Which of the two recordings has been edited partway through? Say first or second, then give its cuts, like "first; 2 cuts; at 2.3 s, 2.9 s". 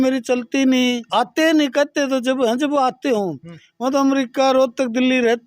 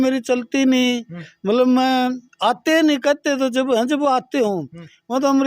first; 1 cut; at 1.0 s